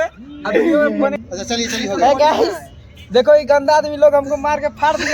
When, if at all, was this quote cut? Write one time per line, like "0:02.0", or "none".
0:01.2